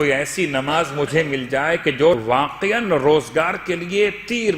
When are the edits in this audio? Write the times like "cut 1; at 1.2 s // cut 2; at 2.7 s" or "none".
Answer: cut 1; at 2.2 s